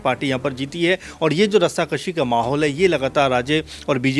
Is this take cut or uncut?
uncut